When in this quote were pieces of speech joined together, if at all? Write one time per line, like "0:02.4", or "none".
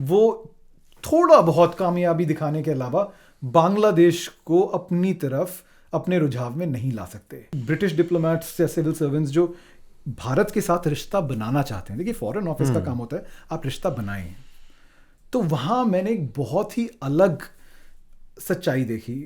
0:07.5